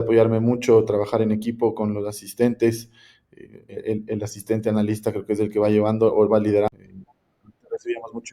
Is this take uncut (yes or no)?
no